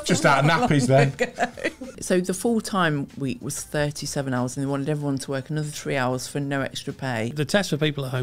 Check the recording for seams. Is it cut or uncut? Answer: cut